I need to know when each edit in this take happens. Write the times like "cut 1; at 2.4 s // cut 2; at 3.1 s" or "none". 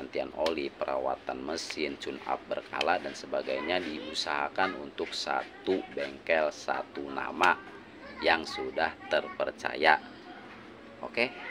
none